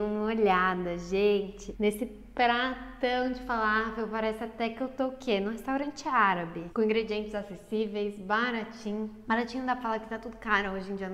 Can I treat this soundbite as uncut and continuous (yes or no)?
yes